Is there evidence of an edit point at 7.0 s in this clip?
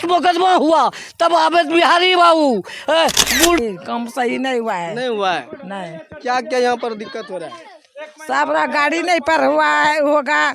no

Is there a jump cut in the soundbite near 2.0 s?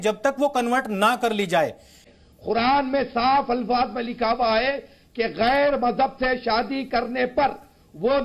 yes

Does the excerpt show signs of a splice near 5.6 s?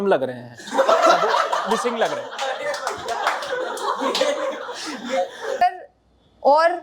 yes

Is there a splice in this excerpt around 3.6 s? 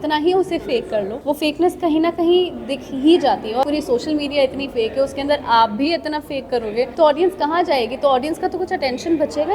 yes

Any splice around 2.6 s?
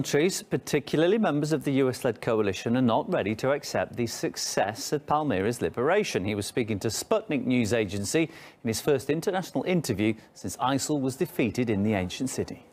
no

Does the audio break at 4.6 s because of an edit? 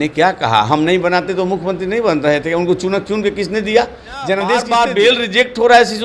yes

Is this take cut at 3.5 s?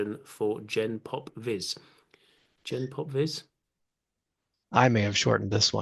no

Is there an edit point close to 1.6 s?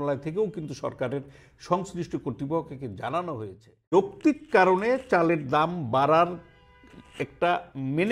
no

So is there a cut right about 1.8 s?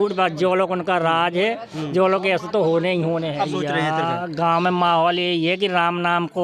no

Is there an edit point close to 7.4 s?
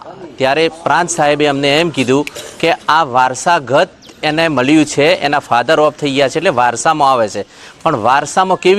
no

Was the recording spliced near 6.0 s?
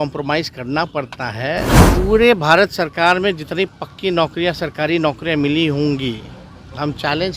no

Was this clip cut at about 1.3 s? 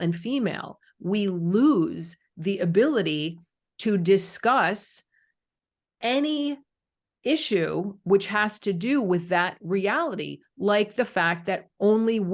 no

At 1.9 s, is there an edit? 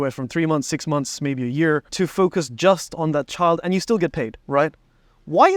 yes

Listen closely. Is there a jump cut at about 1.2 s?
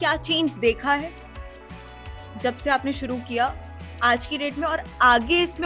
no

